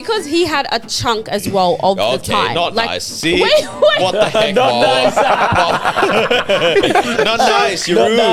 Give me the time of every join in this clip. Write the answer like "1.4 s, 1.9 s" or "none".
none